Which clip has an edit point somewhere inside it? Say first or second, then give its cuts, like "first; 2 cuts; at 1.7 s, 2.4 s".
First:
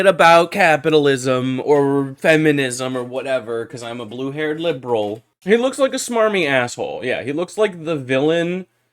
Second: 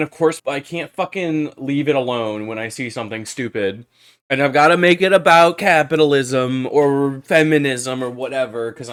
first; 1 cut; at 5.3 s